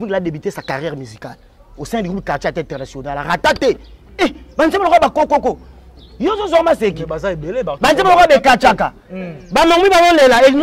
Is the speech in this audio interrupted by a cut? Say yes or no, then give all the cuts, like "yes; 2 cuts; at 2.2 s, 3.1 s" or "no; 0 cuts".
no; 0 cuts